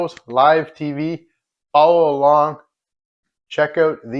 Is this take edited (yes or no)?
no